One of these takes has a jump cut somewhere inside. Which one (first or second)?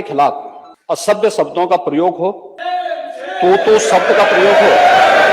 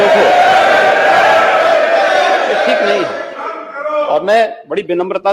first